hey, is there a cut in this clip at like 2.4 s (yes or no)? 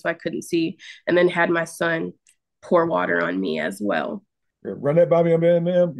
no